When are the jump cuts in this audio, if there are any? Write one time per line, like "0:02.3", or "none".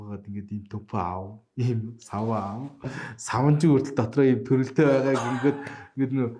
none